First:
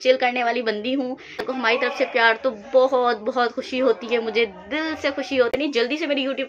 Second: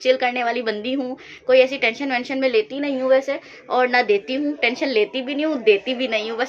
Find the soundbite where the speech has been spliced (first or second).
first